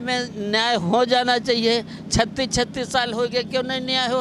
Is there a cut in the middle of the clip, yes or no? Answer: no